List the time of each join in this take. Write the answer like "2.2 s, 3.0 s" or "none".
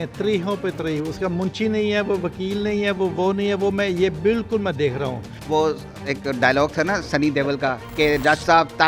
5.3 s, 7.8 s